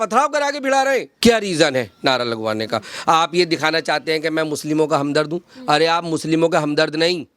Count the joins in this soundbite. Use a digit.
1